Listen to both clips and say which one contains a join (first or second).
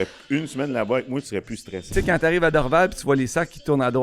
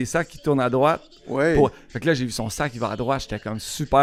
first